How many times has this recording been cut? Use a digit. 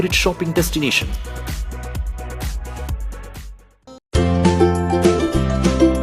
1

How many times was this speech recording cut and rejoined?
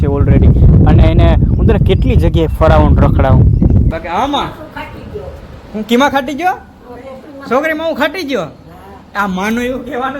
1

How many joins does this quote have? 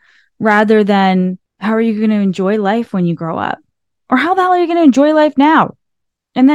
1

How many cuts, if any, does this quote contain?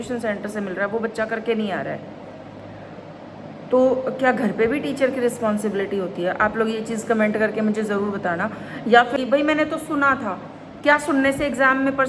1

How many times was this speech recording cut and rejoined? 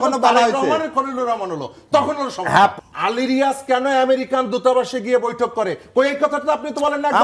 1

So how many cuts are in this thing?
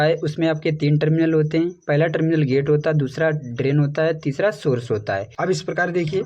1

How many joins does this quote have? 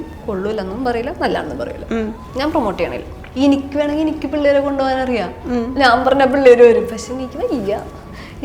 2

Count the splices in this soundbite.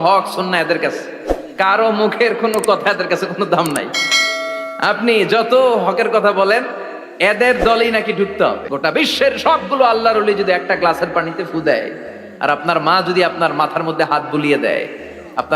1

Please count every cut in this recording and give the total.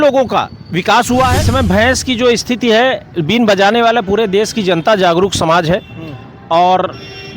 1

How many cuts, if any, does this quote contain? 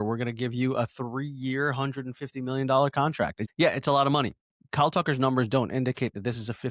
0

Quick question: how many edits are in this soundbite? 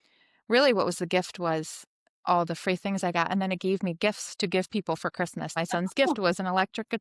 1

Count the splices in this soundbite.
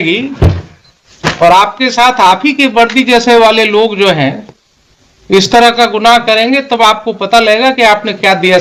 0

